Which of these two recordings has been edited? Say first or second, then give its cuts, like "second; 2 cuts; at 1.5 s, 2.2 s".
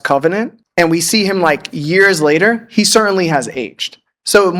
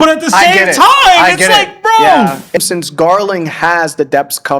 second; 1 cut; at 2.6 s